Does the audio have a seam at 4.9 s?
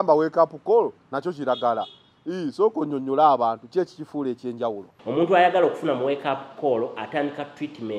yes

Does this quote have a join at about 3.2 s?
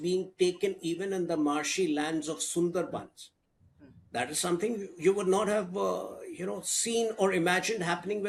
no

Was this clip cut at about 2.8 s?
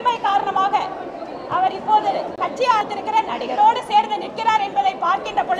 yes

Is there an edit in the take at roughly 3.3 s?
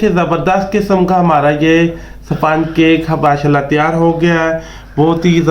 yes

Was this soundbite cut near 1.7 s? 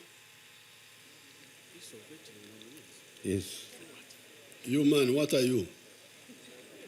yes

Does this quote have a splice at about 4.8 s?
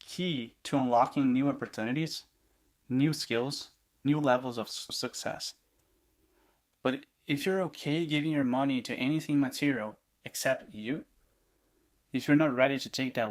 yes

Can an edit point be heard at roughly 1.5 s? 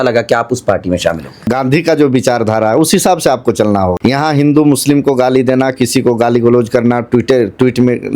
yes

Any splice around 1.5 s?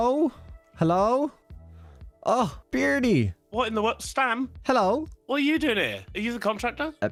no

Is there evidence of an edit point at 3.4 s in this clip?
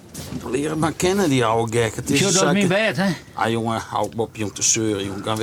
no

